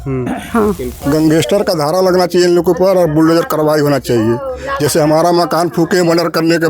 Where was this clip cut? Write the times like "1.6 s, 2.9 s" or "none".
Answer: 0.9 s